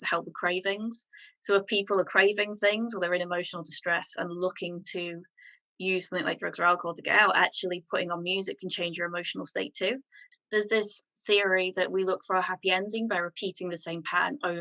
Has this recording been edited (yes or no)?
yes